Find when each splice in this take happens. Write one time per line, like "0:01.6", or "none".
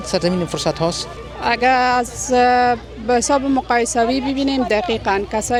none